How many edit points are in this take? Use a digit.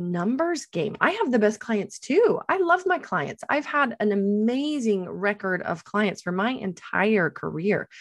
0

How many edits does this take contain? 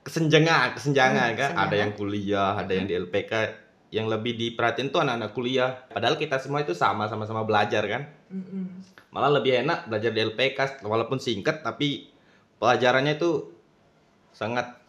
0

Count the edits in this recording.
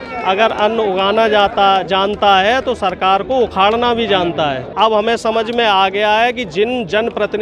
1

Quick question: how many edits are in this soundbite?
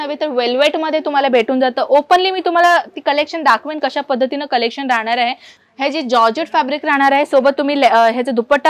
1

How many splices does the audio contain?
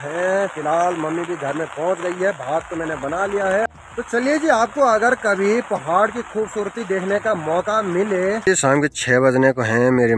2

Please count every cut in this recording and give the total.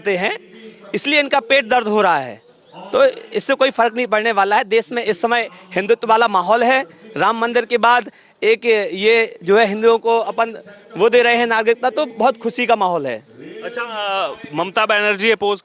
0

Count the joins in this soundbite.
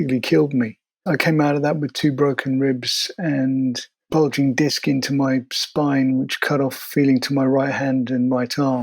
1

